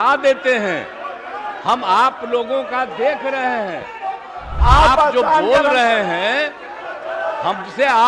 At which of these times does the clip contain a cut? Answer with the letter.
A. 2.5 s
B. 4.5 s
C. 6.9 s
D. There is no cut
B